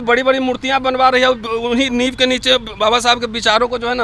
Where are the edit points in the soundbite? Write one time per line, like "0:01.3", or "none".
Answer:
none